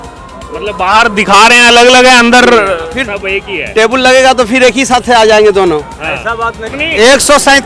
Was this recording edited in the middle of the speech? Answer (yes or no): yes